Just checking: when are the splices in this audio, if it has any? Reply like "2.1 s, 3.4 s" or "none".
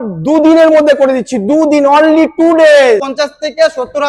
3.1 s